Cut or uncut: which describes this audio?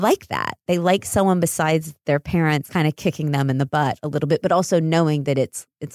cut